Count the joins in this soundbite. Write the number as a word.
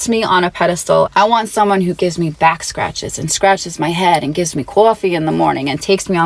one